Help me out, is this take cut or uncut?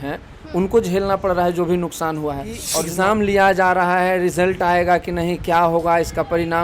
cut